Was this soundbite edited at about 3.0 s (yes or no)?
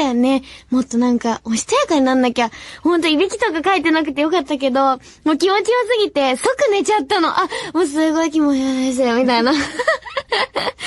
no